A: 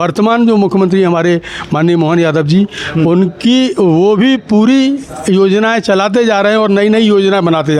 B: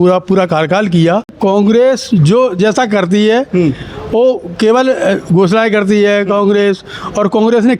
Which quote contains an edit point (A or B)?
B